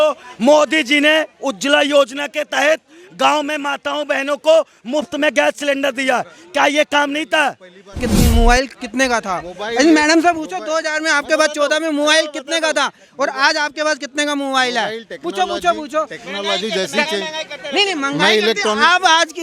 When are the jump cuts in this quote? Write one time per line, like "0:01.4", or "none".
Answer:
0:08.0